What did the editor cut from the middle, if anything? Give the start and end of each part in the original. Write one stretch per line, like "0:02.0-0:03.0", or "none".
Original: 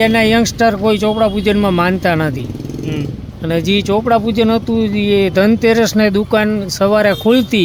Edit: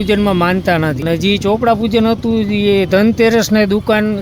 0:02.4-0:03.4